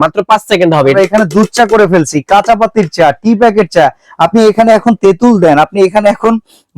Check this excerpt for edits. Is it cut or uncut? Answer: cut